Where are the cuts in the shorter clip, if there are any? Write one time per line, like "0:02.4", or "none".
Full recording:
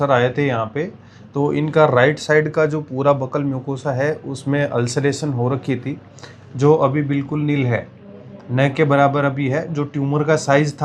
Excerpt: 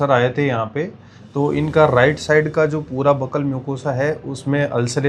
none